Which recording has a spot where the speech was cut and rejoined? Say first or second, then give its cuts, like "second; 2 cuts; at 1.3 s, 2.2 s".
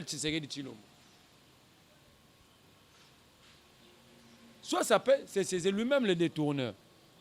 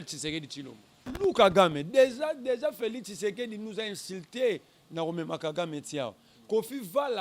second; 1 cut; at 1.1 s